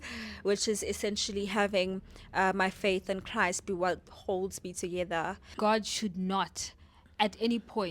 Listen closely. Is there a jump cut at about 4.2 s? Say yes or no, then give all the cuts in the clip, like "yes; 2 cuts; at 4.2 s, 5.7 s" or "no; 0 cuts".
no; 1 cut; at 5.5 s